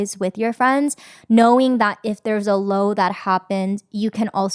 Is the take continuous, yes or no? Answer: yes